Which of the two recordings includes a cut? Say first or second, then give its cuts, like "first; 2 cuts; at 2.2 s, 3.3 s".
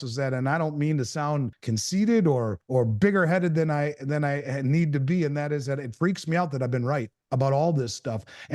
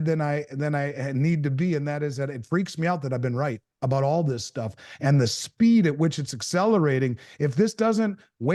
first; 2 cuts; at 1.6 s, 2.6 s